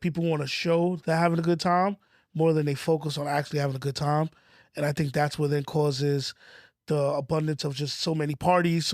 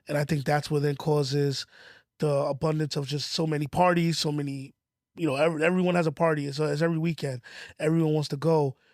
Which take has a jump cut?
first; 1 cut; at 1.0 s

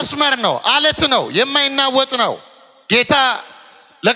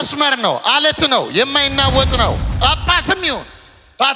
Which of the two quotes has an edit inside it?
second; 1 cut; at 2.5 s

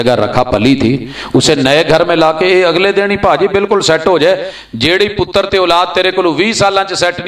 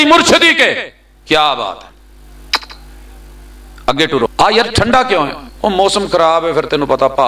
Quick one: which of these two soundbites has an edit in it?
second; 1 cut; at 4.3 s

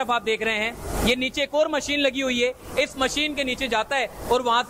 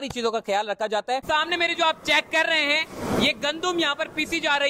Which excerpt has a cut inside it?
second; 1 cut; at 1.2 s

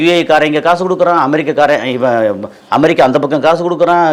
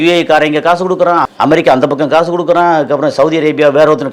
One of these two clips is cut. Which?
second; 1 cut; at 1.3 s

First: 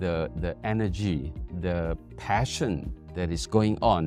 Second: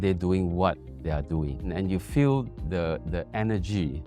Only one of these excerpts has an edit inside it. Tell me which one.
second; 1 cut; at 1.7 s

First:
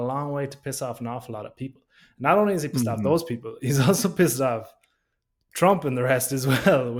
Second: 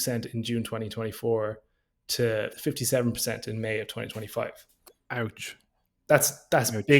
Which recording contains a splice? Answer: second; 1 cut; at 2.5 s

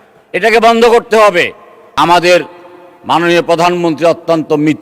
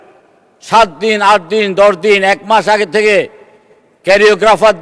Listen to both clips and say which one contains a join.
first; 1 cut; at 2.0 s

